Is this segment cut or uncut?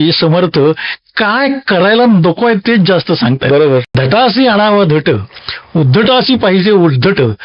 cut